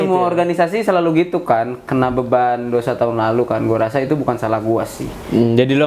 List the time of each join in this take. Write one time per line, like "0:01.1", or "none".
none

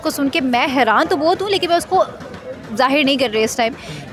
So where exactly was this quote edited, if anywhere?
none

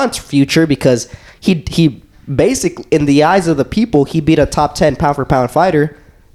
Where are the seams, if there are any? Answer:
none

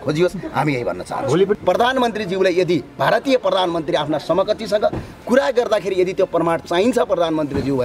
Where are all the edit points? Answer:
0:01.6

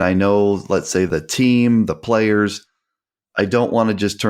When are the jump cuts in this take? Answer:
0:01.1

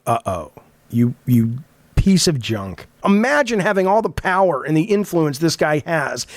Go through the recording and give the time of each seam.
0:02.9

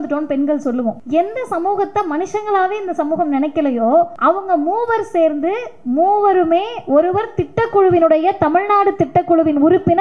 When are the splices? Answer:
0:01.0
0:04.1

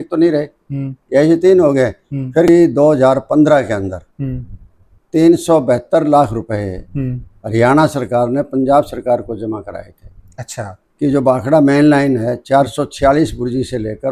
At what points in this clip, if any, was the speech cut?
0:02.5

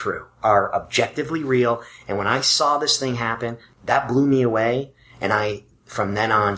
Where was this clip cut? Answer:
0:03.6

